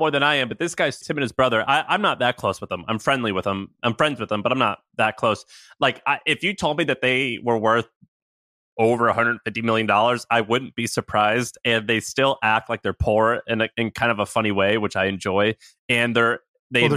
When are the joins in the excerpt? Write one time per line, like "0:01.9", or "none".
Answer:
0:01.0